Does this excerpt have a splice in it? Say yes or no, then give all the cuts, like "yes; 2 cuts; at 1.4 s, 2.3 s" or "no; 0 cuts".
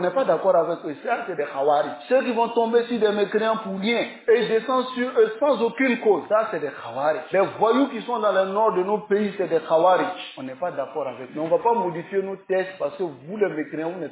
no; 0 cuts